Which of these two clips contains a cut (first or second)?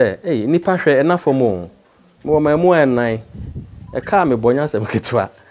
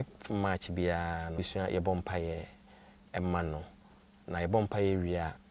second